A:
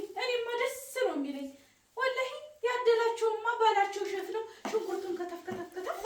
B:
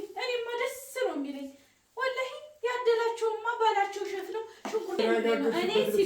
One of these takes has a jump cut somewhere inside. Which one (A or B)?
B